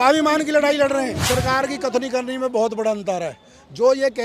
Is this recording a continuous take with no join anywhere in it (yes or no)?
no